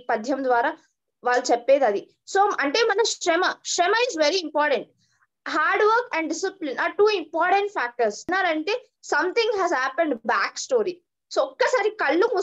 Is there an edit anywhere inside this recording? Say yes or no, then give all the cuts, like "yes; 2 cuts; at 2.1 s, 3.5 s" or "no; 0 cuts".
yes; 1 cut; at 8.3 s